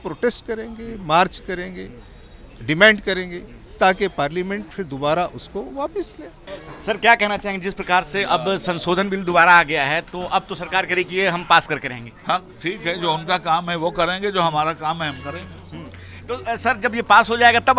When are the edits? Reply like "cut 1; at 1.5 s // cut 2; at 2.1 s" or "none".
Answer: none